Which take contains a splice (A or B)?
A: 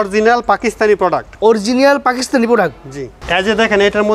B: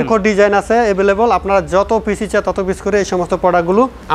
A